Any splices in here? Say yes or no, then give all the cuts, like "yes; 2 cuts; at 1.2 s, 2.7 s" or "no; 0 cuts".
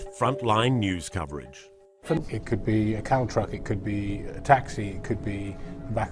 yes; 1 cut; at 2.2 s